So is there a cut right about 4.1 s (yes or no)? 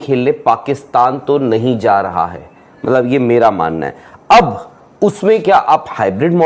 no